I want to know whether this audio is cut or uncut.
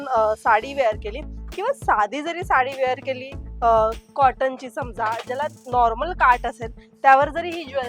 uncut